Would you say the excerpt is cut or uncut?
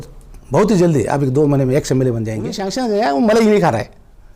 cut